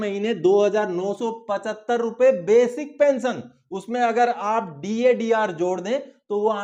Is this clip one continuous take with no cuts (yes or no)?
yes